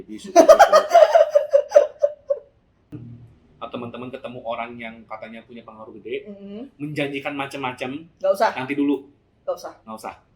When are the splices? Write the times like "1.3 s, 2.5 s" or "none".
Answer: 2.9 s